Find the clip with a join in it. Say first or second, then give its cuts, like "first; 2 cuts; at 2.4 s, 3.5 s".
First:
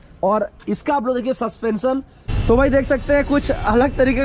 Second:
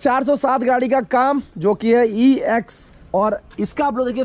first; 1 cut; at 2.3 s